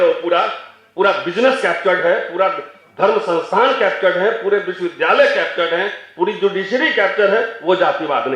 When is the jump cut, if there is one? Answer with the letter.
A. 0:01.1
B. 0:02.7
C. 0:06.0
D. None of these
D